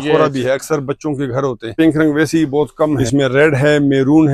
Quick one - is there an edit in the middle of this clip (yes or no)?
yes